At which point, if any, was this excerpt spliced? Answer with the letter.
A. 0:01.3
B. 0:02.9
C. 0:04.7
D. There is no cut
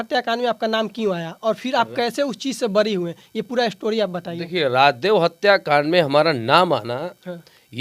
D